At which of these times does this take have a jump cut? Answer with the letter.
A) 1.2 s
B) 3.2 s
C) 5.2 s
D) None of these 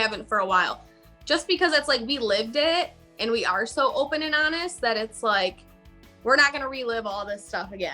D